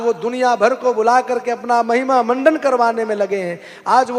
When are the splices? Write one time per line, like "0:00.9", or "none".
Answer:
none